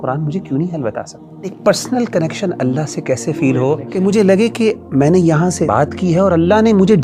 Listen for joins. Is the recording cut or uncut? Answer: cut